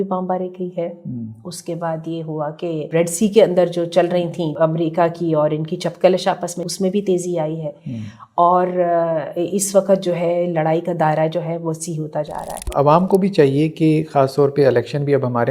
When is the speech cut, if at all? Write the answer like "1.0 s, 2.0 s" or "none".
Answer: 2.8 s, 4.5 s, 6.6 s, 12.7 s